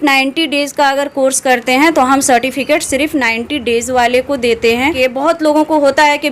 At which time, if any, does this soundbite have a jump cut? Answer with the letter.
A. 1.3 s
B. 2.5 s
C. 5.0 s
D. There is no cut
C